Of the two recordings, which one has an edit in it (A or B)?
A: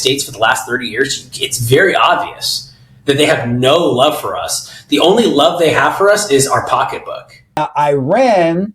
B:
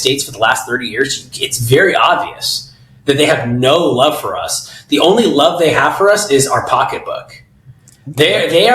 A